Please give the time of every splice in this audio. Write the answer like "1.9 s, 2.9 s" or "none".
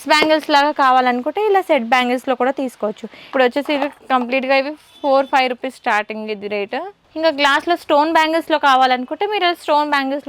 3.3 s, 7.0 s